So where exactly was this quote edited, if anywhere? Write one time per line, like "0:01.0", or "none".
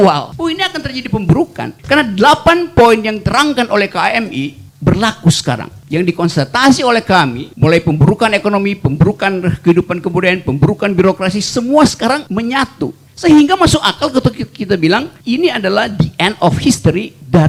none